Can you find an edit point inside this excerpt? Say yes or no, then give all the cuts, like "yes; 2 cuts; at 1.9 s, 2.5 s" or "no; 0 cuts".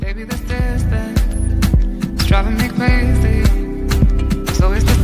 no; 0 cuts